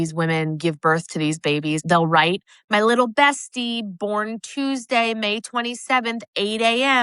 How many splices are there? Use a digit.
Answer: 1